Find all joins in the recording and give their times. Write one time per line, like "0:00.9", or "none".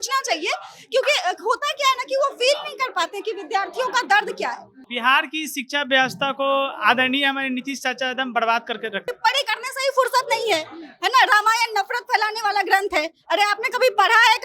0:04.8
0:09.1